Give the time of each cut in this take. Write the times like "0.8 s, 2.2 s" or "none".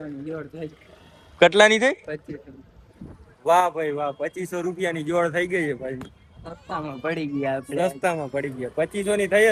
none